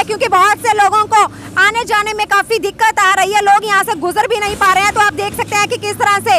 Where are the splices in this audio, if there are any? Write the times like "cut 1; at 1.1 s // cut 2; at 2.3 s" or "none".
none